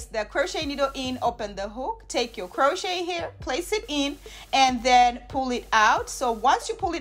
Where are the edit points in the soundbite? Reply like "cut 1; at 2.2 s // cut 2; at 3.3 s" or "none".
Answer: none